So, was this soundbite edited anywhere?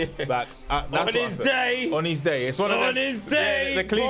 no; 0 cuts

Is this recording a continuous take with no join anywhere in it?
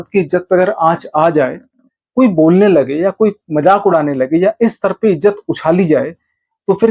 yes; 0 cuts

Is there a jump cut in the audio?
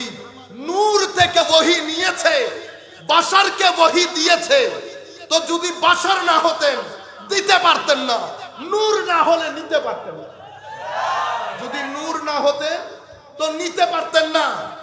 yes; 1 cut; at 1.4 s

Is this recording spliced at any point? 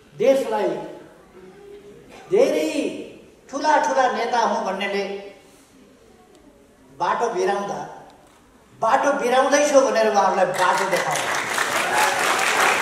no; 0 cuts

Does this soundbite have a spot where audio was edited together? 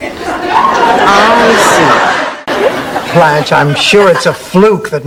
no; 0 cuts

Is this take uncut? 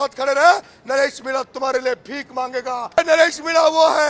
no; 1 cut; at 3.0 s

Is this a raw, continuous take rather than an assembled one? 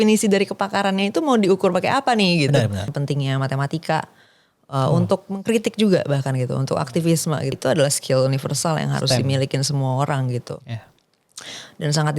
no; 2 cuts; at 2.9 s, 7.5 s

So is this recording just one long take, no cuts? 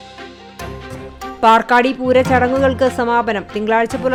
yes; 0 cuts

